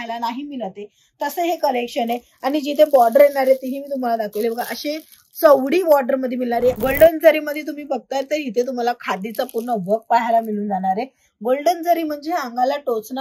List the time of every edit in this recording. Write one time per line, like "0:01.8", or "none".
0:06.8